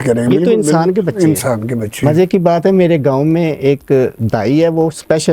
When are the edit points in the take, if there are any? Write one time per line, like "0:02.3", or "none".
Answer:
0:02.0